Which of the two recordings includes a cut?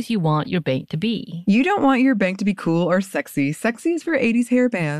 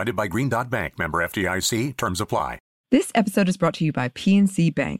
second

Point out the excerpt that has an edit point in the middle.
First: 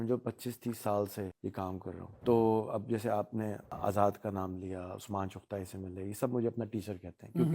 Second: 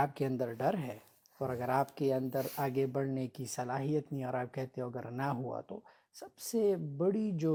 first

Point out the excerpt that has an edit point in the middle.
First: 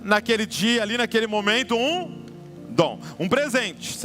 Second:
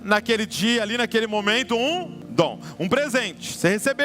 second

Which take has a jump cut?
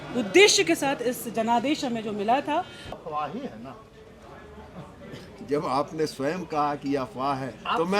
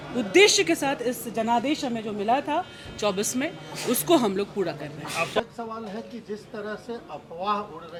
first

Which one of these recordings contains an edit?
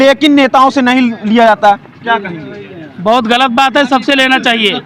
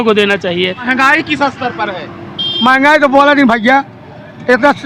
second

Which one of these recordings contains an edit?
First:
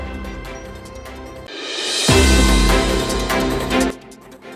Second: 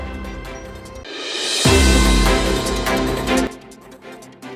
second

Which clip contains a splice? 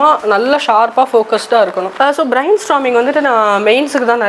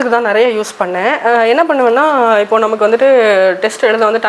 first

